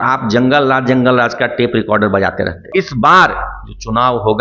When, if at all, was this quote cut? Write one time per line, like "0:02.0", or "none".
0:02.6